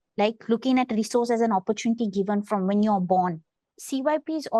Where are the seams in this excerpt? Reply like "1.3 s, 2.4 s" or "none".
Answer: 3.5 s